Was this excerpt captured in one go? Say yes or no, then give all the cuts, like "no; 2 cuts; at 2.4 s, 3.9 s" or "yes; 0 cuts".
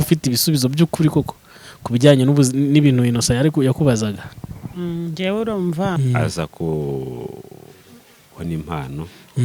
no; 1 cut; at 6.0 s